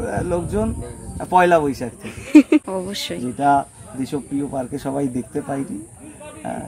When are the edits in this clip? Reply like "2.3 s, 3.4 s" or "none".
2.7 s